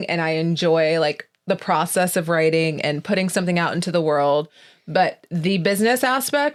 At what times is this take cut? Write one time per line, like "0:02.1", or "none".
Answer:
none